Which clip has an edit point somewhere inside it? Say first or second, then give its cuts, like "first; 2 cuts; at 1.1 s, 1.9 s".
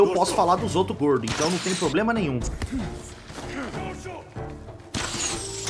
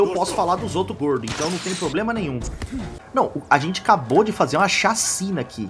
second; 1 cut; at 3.0 s